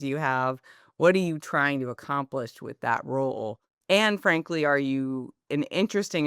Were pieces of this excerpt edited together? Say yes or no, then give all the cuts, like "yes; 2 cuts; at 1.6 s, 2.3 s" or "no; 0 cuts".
yes; 2 cuts; at 3.7 s, 5.3 s